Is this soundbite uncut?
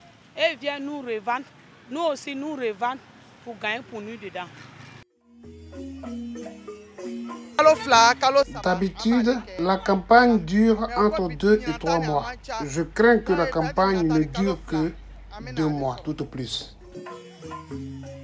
yes; 0 cuts

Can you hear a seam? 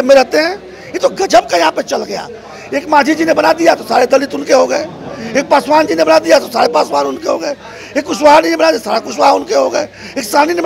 no; 0 cuts

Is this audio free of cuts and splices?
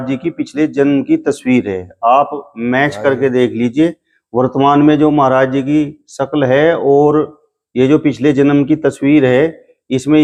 yes; 0 cuts

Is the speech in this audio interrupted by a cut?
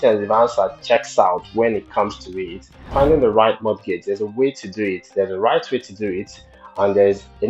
yes; 1 cut; at 2.9 s

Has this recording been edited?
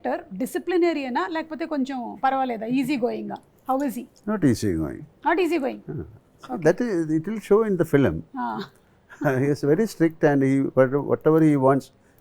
no; 0 cuts

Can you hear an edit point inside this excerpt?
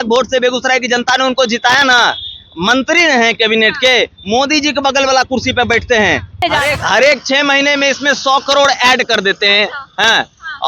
yes; 1 cut; at 6.4 s

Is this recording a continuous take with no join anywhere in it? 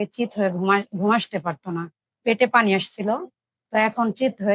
yes; 0 cuts

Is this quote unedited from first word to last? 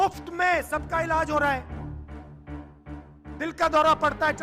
yes; 0 cuts

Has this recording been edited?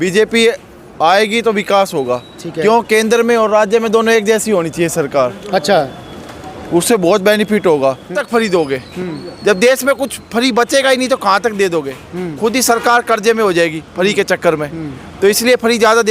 yes; 1 cut; at 8.2 s

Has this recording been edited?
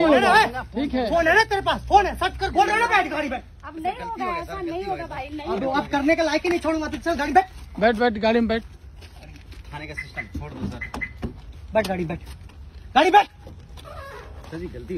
yes; 1 cut; at 2.5 s

